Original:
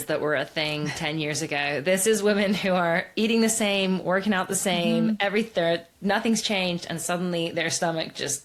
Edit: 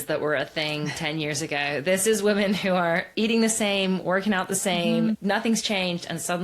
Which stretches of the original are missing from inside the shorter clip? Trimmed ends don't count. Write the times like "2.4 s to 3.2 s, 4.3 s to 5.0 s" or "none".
5.2 s to 6.0 s